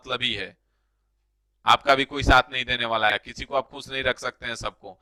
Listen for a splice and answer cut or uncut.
uncut